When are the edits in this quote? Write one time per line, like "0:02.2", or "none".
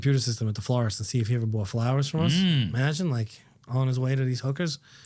none